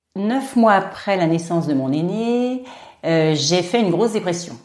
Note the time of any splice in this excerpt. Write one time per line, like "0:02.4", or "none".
0:00.9